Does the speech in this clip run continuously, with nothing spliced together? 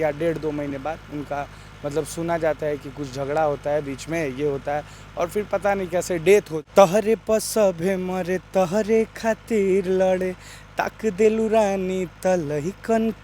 no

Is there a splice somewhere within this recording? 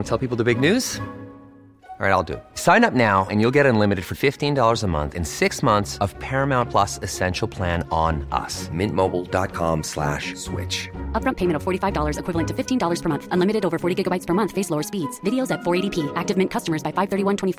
no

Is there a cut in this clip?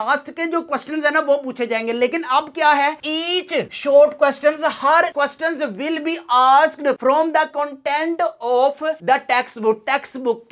yes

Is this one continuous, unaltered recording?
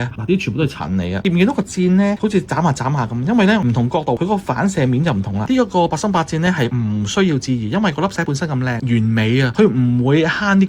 no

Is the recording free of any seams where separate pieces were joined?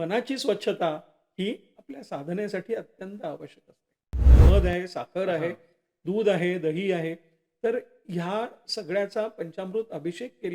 no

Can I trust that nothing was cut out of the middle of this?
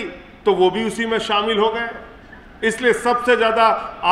yes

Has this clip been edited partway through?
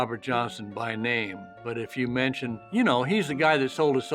yes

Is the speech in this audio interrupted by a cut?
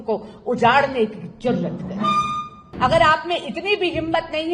yes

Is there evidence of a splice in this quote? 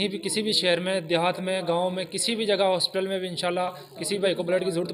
no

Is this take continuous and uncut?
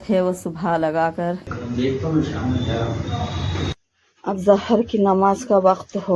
no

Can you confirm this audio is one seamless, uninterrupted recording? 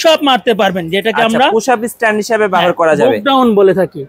yes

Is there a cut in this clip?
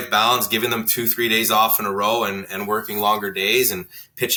no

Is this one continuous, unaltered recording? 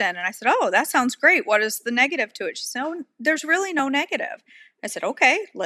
yes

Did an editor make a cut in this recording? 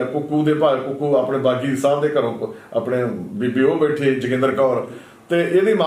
no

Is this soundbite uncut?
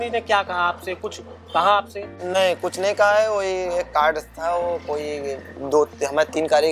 no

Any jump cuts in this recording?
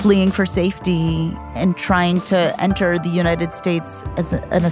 yes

